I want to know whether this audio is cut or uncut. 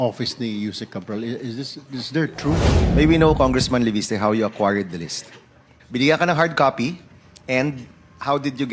cut